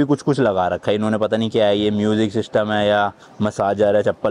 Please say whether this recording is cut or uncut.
uncut